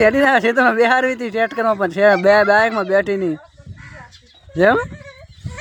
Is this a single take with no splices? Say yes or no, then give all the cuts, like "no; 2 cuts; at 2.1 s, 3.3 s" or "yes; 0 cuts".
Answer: yes; 0 cuts